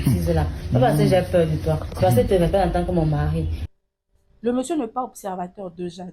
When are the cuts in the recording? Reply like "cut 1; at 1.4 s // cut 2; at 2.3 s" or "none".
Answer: cut 1; at 3.6 s

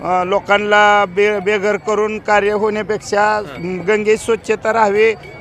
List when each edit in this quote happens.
none

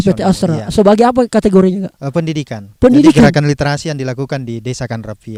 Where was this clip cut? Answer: none

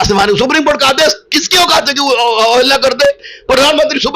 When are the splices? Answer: none

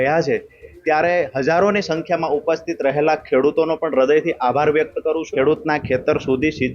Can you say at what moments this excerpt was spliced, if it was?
cut 1; at 5.3 s

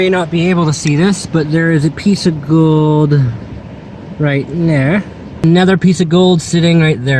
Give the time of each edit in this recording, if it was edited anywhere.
cut 1; at 5.4 s

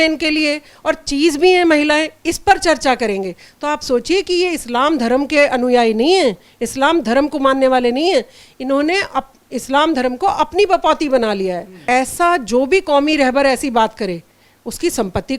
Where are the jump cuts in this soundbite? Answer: cut 1; at 11.8 s

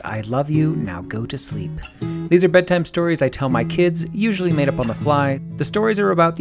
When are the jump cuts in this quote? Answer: cut 1; at 5.5 s

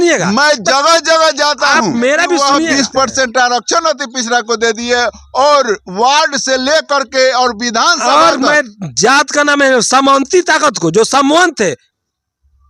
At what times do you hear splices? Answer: cut 1; at 2.4 s

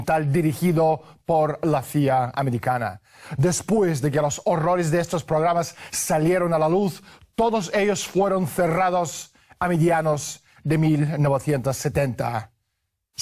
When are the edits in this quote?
cut 1; at 7.2 s

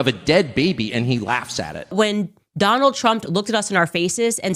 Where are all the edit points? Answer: cut 1; at 1.9 s

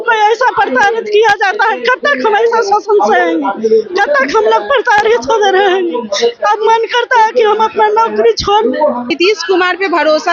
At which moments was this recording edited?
cut 1; at 9.1 s

